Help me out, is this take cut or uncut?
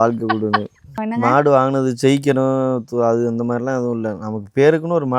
cut